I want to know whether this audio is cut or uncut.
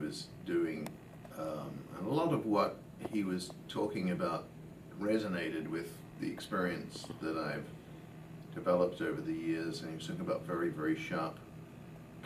uncut